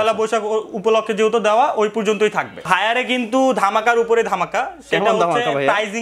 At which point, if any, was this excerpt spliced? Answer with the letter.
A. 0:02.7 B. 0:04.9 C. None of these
A